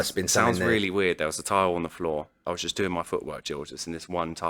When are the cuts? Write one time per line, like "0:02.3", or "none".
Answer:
0:02.4